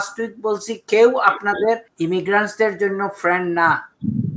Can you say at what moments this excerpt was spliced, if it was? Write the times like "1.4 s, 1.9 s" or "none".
1.9 s